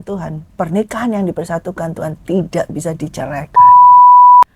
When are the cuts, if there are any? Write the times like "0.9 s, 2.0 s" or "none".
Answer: 3.6 s